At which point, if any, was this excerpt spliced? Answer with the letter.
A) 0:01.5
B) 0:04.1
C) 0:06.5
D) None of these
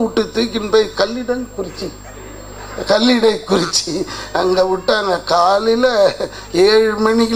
D